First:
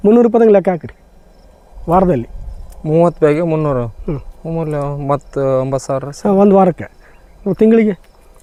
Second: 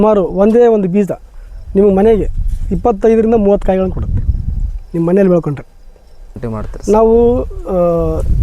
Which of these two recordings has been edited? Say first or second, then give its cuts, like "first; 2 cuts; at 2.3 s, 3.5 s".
second; 1 cut; at 6.4 s